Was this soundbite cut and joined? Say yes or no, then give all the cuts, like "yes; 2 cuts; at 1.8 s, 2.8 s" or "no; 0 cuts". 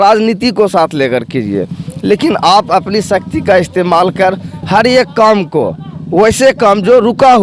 no; 0 cuts